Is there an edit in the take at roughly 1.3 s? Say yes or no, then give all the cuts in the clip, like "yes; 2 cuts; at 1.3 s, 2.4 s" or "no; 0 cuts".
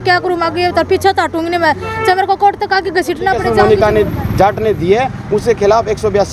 no; 1 cut; at 3.5 s